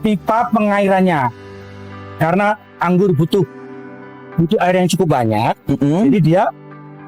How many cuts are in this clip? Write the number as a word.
one